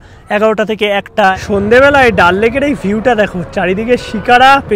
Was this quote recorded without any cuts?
no; 1 cut; at 1.3 s

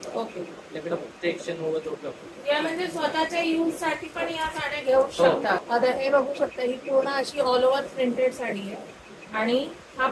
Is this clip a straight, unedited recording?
no; 1 cut; at 5.6 s

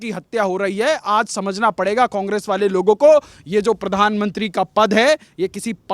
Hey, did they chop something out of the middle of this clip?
no; 0 cuts

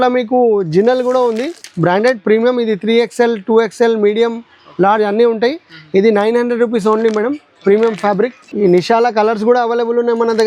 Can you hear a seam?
no; 0 cuts

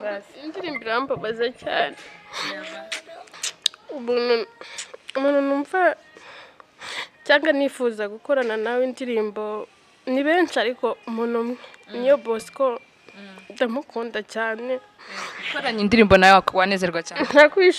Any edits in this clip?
yes; 1 cut; at 3.3 s

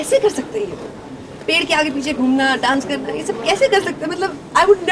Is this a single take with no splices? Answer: yes; 0 cuts

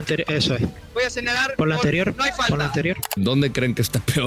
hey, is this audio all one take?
no; 1 cut; at 3.2 s

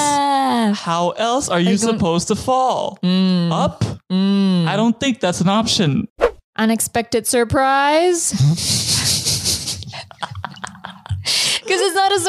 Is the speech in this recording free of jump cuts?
no; 1 cut; at 6.5 s

